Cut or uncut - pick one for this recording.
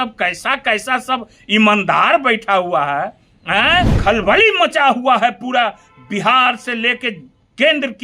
cut